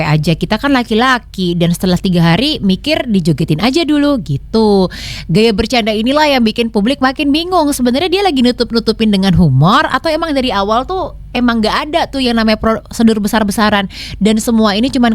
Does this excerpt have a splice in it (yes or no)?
no